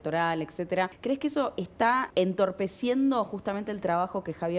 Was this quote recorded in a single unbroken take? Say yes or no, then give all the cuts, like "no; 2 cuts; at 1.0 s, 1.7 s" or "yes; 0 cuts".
no; 2 cuts; at 1.0 s, 2.1 s